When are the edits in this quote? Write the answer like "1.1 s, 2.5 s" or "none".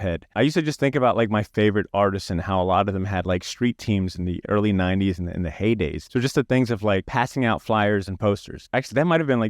1.5 s, 4.4 s, 8.6 s